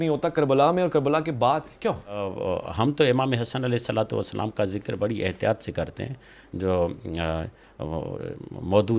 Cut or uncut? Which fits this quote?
cut